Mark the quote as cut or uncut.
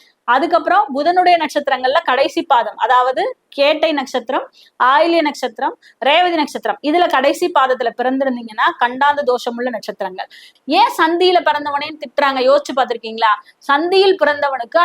cut